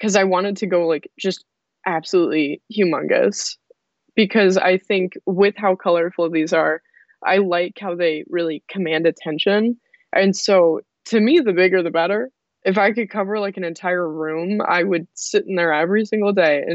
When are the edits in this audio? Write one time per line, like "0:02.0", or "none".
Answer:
0:12.3